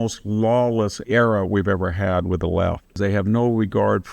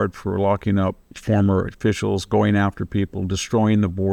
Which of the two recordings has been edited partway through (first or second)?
first